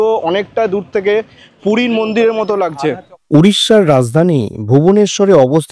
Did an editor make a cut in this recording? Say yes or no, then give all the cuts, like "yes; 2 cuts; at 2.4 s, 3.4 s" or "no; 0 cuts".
no; 0 cuts